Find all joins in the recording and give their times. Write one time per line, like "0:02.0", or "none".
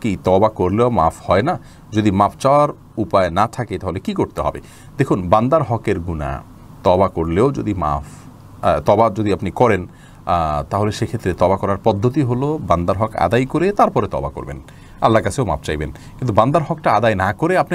none